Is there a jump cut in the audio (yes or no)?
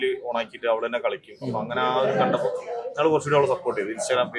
no